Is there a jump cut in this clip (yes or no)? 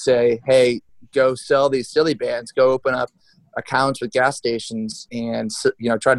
yes